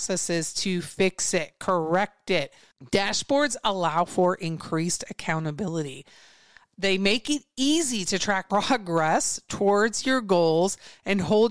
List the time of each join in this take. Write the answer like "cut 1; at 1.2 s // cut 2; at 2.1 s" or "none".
cut 1; at 8.4 s